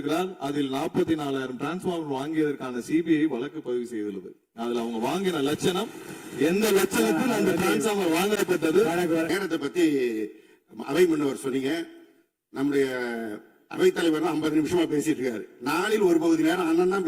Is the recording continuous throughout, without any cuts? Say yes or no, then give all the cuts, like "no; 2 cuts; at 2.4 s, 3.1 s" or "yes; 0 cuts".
no; 1 cut; at 9.3 s